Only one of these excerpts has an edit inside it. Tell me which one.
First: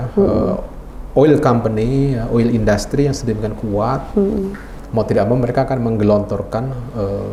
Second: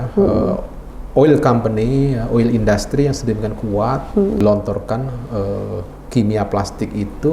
second; 1 cut; at 4.4 s

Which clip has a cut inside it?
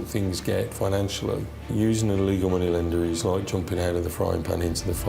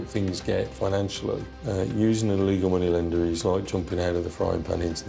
first; 1 cut; at 1.7 s

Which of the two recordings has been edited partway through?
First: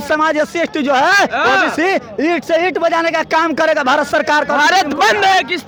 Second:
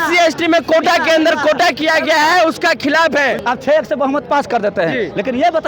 second; 1 cut; at 3.4 s

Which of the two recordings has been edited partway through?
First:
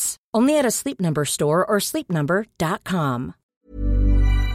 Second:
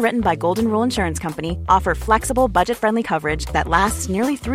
first; 1 cut; at 3.5 s

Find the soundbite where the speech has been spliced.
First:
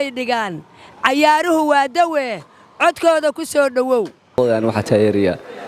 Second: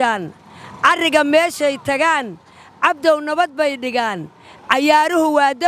first; 1 cut; at 4.4 s

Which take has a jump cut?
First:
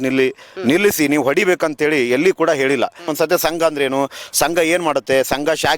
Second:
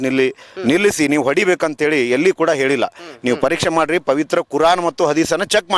first; 1 cut; at 3.0 s

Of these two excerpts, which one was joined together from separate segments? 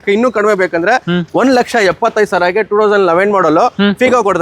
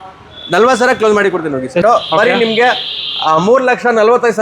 second; 1 cut; at 1.8 s

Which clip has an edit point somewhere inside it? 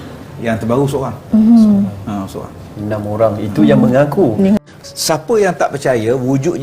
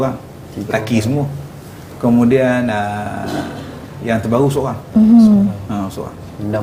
first; 1 cut; at 4.6 s

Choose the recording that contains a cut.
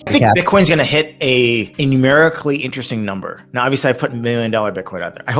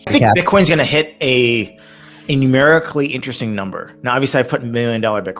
first; 1 cut; at 1.7 s

